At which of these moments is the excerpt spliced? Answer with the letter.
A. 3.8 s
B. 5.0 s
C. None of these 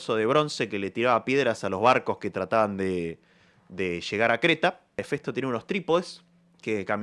B